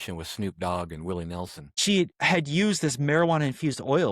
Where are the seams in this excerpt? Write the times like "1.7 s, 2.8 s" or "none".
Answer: 1.8 s